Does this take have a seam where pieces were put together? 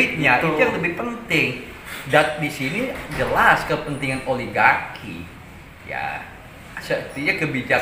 no; 0 cuts

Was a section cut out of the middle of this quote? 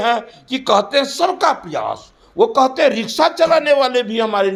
no; 0 cuts

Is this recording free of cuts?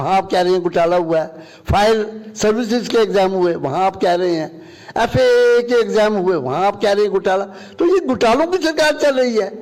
yes; 0 cuts

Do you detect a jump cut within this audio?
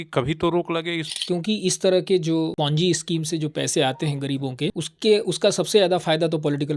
yes; 3 cuts; at 1.1 s, 2.5 s, 4.9 s

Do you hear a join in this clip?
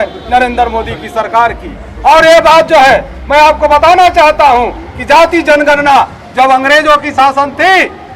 no; 0 cuts

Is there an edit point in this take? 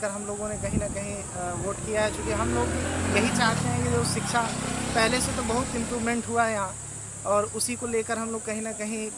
no; 0 cuts

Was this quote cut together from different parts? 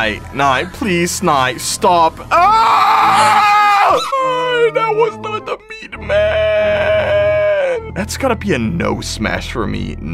yes; 2 cuts; at 4.1 s, 7.9 s

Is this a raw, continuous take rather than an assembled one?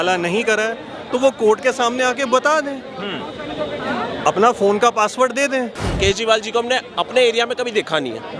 no; 1 cut; at 5.9 s

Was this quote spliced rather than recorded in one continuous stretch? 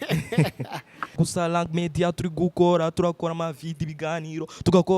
yes; 1 cut; at 1.2 s

